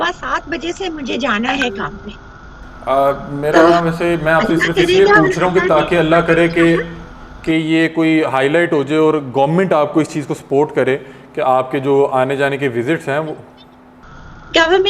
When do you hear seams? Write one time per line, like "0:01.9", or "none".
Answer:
none

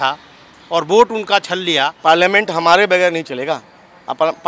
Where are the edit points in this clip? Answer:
0:01.9

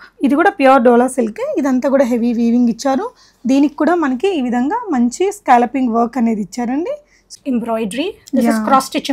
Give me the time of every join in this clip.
0:07.3

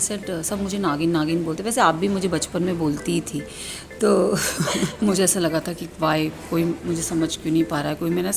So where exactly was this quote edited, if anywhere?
0:04.9

